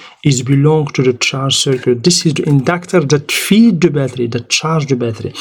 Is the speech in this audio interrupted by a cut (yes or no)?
no